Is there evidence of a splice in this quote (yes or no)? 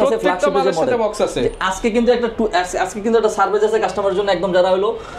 no